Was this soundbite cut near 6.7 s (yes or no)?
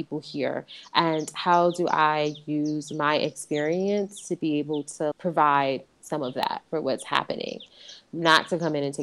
no